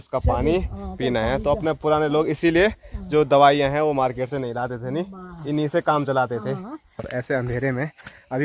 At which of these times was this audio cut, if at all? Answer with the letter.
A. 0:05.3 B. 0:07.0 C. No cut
B